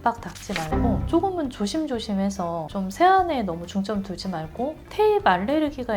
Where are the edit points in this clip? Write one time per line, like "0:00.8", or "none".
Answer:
0:04.8

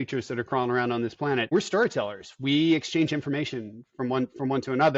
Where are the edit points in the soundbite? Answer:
0:01.5

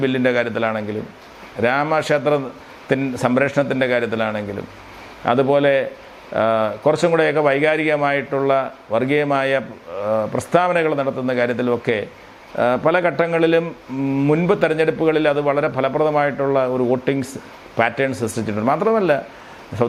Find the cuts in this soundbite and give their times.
none

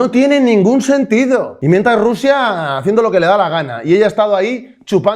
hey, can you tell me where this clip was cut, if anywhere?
0:01.5

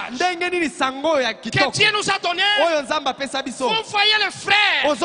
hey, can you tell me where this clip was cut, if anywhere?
none

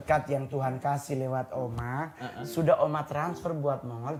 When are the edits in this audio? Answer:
none

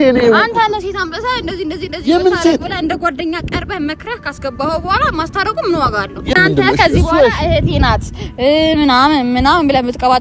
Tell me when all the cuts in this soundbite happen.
0:06.3

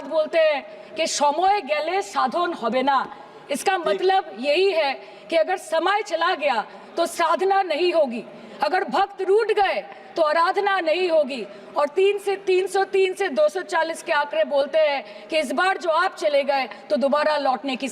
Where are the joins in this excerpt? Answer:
none

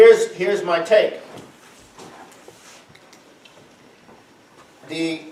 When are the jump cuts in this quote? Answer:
none

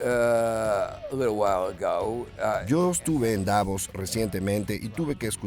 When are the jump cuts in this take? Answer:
0:02.6

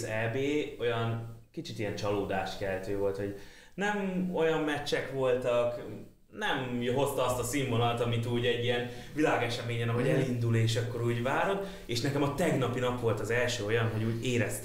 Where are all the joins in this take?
none

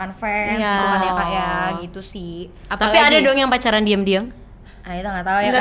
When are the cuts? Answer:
none

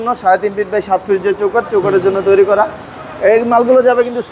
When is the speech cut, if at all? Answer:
none

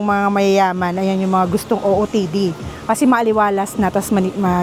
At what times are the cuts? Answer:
none

